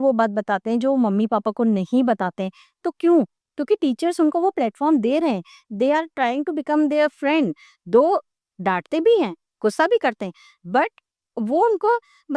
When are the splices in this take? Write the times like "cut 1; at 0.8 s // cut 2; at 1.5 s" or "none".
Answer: none